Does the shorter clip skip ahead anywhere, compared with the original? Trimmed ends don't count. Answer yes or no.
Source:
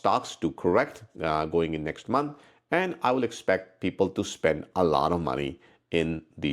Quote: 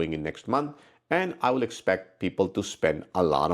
no